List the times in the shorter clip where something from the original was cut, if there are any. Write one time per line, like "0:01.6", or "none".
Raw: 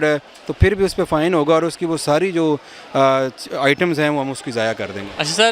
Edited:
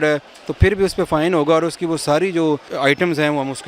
0:02.7